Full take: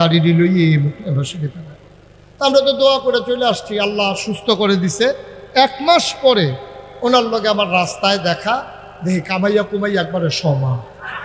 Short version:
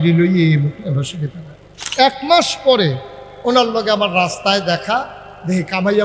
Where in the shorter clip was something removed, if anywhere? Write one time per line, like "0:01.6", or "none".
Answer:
0:01.8